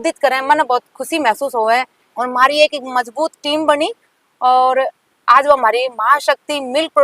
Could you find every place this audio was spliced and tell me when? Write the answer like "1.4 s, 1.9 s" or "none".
2.0 s